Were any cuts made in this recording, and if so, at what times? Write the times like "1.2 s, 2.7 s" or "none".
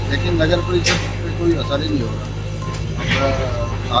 none